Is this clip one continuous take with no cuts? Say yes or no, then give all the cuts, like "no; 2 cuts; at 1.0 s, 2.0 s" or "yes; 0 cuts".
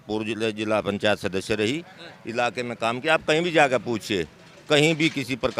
yes; 0 cuts